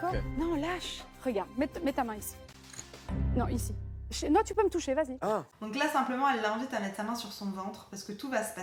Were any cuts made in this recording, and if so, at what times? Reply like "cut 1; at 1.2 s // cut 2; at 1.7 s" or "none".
none

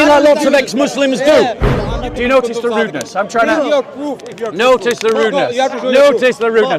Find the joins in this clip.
cut 1; at 1.8 s

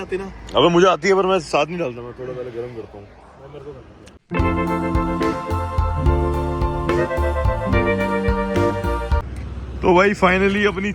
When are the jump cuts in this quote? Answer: cut 1; at 4.2 s

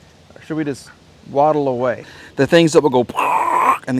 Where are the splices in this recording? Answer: cut 1; at 2.1 s

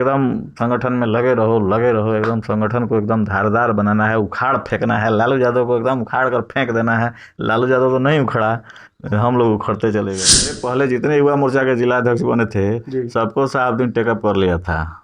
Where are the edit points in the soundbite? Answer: cut 1; at 10.6 s

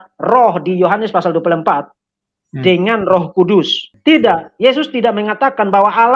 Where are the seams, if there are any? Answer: cut 1; at 3.8 s

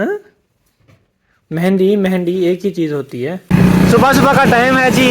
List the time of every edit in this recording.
cut 1; at 3.4 s

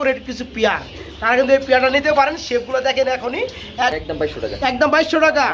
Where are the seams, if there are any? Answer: cut 1; at 4.0 s

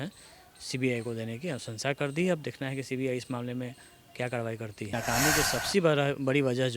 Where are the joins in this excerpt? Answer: cut 1; at 5.0 s

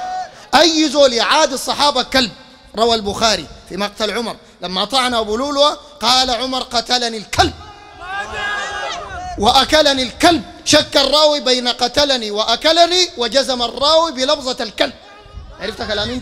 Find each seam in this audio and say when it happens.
none

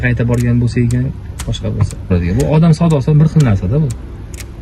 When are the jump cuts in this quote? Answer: cut 1; at 2.1 s

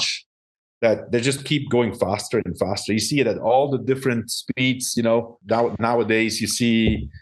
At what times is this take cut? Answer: cut 1; at 5.4 s

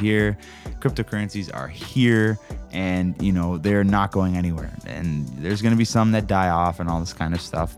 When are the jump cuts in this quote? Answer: cut 1; at 6.8 s

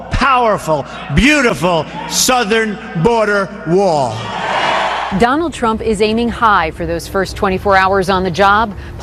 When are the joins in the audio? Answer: none

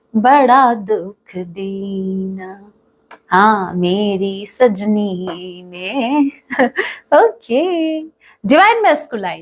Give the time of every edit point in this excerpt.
none

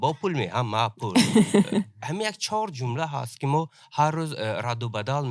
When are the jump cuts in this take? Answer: none

